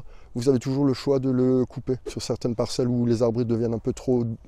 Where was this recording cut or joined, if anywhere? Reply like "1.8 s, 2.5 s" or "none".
2.2 s